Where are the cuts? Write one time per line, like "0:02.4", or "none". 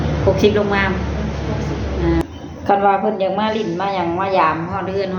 0:02.2